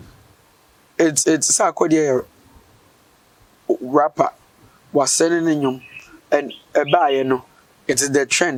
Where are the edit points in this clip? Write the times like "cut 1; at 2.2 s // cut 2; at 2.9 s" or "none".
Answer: none